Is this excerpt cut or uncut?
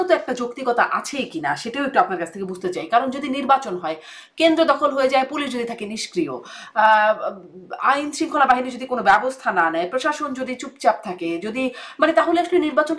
uncut